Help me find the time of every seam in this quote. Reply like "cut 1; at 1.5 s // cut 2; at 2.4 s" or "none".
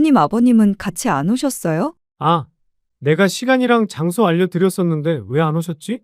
cut 1; at 2.1 s